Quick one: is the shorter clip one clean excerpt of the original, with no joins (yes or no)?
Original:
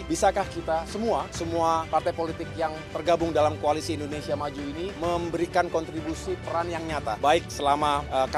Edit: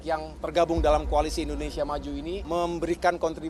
yes